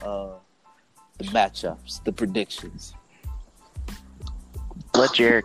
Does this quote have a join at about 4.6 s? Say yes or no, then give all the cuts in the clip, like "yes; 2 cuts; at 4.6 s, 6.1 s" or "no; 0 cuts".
yes; 2 cuts; at 2.8 s, 4.6 s